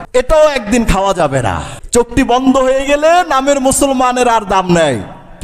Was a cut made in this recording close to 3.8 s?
no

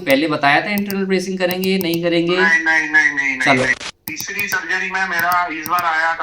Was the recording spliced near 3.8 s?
yes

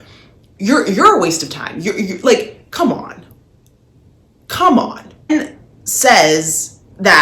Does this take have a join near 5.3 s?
yes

